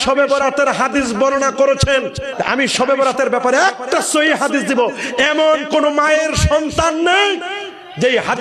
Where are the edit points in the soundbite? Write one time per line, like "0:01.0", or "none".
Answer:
0:02.3